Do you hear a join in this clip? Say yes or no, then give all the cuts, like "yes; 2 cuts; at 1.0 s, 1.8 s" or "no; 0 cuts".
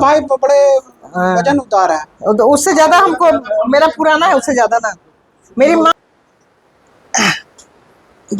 yes; 1 cut; at 5.9 s